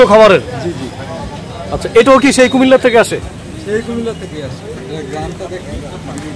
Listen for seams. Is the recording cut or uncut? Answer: uncut